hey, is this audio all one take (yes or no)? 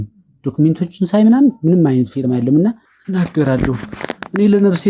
no